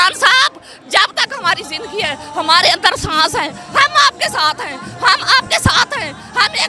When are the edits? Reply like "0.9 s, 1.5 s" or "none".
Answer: none